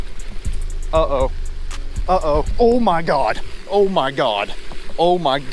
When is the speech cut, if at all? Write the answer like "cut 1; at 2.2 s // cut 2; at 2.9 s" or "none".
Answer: none